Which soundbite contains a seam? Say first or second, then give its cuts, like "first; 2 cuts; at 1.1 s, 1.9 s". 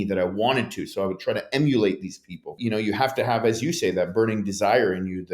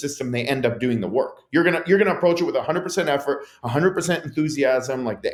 first; 1 cut; at 2.5 s